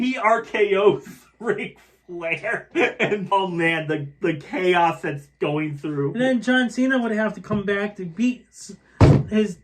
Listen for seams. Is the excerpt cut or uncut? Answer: cut